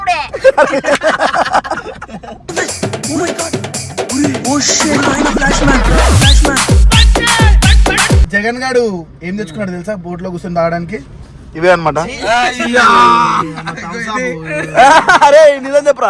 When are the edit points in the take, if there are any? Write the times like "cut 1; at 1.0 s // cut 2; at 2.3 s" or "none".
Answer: cut 1; at 8.3 s